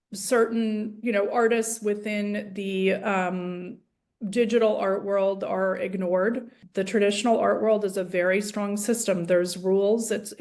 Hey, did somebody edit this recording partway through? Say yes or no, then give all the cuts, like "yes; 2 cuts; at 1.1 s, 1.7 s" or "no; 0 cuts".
yes; 1 cut; at 6.6 s